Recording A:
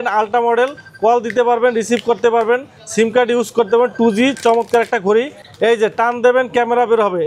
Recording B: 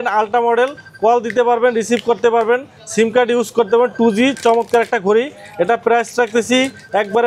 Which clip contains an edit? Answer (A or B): A